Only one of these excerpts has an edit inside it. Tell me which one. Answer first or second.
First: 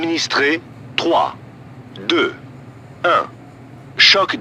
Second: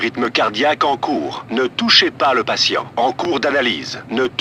second